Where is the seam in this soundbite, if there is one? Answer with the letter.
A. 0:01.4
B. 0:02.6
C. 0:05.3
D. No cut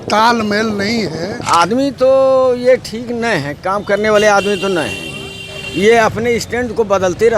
A